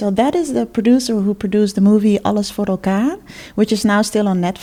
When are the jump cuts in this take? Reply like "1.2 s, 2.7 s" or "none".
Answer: none